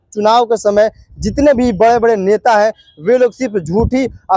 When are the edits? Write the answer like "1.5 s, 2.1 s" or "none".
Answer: none